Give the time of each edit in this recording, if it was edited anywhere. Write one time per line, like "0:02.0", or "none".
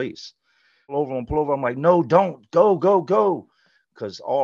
0:00.9